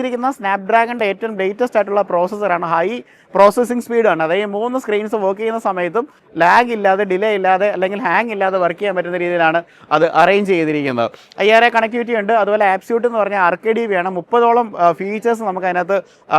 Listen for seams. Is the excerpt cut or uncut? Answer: uncut